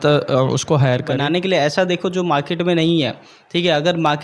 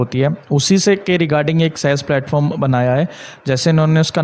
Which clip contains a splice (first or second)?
first